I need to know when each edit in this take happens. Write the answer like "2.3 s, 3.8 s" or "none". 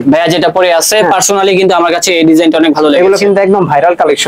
none